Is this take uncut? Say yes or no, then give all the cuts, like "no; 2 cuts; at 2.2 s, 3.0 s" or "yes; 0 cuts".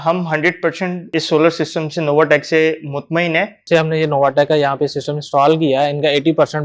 no; 2 cuts; at 1.1 s, 3.6 s